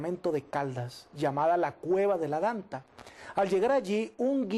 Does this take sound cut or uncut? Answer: cut